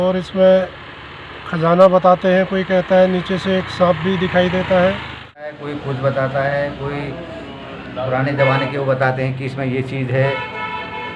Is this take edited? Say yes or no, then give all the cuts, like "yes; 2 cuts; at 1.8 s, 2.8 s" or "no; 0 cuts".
yes; 1 cut; at 5.6 s